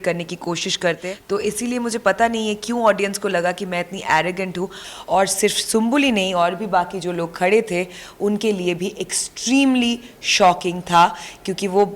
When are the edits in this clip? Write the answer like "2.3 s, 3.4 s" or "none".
1.0 s, 4.8 s